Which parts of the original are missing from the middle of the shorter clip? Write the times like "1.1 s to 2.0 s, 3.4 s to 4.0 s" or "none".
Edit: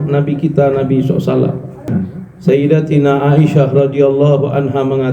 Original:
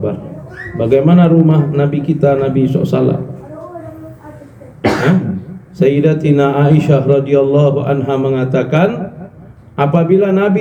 3.6 s to 5.2 s